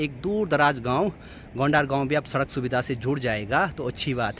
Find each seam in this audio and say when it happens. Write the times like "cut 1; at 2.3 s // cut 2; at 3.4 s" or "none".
none